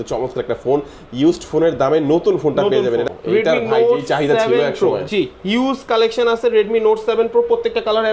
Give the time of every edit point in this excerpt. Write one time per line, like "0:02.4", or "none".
0:03.1